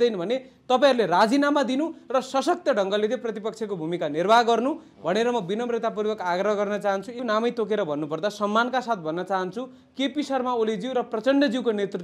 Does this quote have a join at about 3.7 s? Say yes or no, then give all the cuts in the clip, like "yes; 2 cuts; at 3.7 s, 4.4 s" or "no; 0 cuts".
no; 1 cut; at 7.2 s